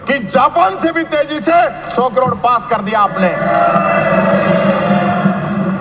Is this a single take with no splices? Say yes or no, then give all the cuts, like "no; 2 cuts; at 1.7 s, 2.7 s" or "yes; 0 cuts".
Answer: yes; 0 cuts